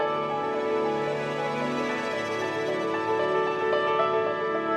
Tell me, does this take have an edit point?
no; 0 cuts

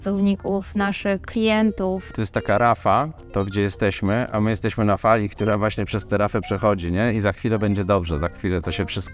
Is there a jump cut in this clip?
yes; 2 cuts; at 2.1 s, 3.2 s

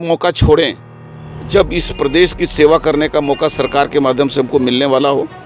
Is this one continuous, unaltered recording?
yes; 0 cuts

